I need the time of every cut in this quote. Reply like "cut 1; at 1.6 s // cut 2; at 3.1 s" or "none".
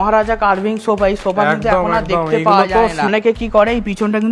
cut 1; at 3.1 s